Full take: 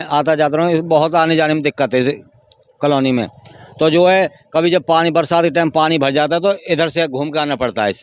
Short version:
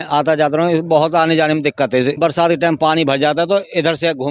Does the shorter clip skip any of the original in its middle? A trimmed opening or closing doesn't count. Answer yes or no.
yes